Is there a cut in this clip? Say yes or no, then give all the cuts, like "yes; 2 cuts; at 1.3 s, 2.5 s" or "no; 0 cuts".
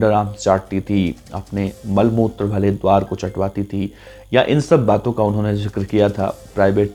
no; 0 cuts